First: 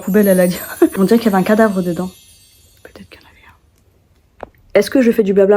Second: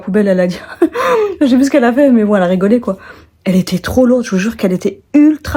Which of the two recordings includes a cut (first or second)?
first